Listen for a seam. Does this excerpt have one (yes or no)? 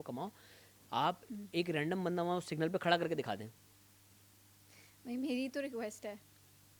no